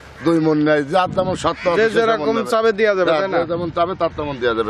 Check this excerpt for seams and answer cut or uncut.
uncut